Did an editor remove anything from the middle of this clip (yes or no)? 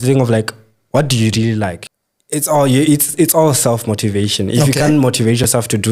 yes